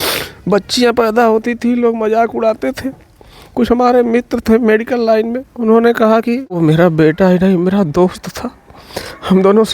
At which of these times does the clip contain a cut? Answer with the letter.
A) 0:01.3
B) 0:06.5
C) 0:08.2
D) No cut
B